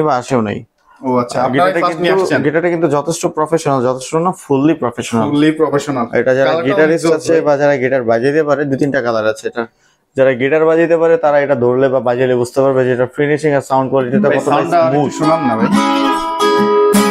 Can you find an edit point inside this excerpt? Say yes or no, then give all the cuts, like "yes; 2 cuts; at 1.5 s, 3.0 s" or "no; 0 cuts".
no; 0 cuts